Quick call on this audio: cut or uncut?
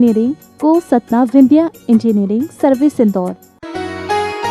cut